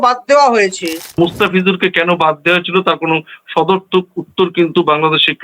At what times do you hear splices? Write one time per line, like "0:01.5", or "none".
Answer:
0:01.1